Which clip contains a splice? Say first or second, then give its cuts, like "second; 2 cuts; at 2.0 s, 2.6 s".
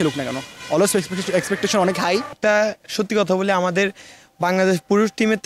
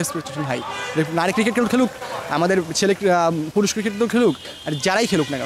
first; 1 cut; at 2.3 s